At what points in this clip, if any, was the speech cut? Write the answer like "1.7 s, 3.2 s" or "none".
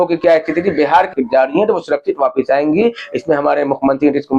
1.1 s